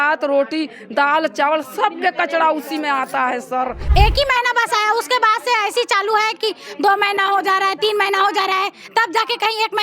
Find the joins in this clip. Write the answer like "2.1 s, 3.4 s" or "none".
3.8 s